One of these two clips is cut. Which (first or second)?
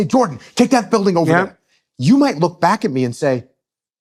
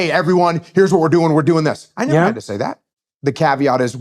second